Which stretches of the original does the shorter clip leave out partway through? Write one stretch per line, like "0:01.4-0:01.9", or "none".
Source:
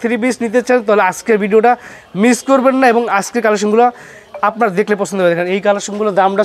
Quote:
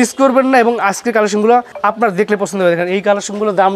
0:04.0-0:04.3